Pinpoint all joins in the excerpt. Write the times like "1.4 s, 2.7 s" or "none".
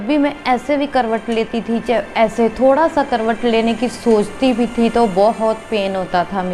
none

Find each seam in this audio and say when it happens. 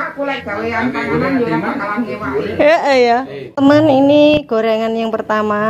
3.5 s

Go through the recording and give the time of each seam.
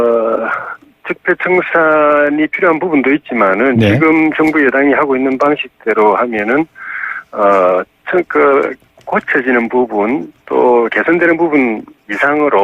5.3 s

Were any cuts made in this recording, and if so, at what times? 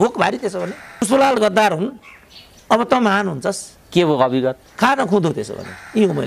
1.1 s

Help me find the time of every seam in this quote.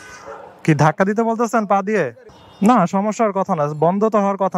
2.4 s

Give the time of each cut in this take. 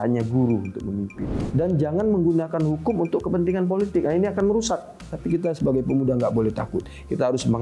1.4 s, 5.1 s

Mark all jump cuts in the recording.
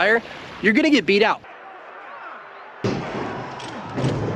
none

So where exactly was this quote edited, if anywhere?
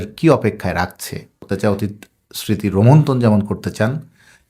1.4 s

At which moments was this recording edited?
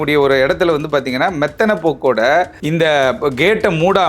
2.6 s

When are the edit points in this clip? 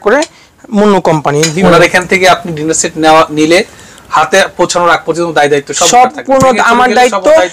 1.5 s

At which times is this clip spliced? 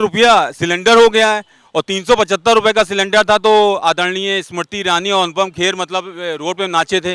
none

